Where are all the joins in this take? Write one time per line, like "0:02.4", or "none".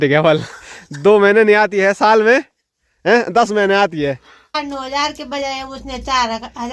0:04.6